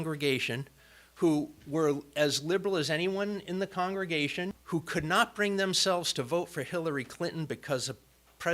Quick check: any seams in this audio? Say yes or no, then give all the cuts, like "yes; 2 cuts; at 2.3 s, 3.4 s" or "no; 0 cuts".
yes; 1 cut; at 4.6 s